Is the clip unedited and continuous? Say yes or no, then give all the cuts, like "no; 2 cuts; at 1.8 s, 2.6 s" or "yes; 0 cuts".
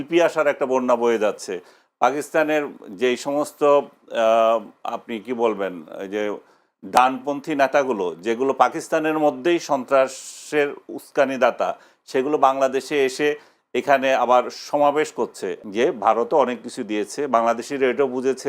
no; 1 cut; at 15.5 s